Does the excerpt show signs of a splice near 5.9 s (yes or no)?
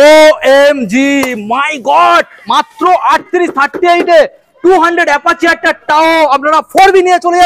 no